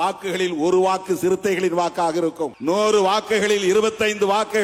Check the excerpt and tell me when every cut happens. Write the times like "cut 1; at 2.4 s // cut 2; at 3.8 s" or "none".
cut 1; at 2.5 s